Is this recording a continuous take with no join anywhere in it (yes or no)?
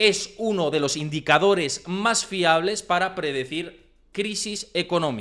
yes